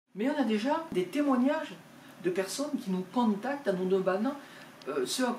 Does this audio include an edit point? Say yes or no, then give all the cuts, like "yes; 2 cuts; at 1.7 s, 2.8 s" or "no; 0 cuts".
yes; 1 cut; at 0.9 s